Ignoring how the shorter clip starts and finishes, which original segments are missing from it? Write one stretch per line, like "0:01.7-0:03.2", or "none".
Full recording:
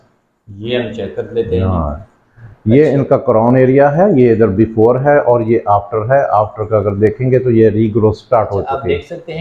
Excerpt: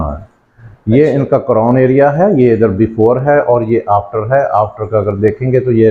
none